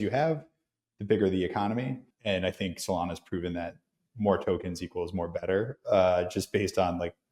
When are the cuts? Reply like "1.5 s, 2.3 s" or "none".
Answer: 2.1 s